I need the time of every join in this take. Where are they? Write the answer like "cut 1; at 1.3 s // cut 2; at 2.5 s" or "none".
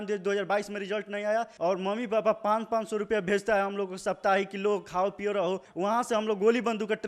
cut 1; at 1.5 s // cut 2; at 5.7 s